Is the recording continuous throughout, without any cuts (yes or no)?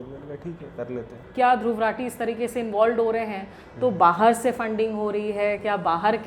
no